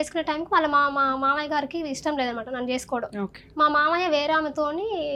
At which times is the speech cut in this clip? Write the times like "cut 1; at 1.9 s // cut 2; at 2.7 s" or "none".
none